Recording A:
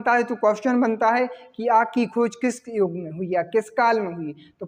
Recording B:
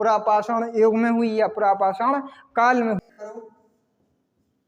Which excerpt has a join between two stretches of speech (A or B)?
B